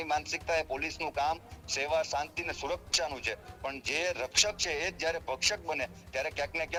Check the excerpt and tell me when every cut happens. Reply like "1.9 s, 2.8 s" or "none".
none